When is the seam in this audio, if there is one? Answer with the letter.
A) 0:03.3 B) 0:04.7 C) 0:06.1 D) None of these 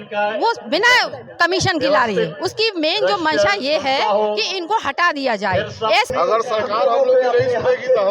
C